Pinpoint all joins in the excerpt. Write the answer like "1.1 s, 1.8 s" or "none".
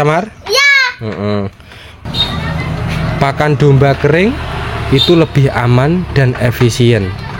1.9 s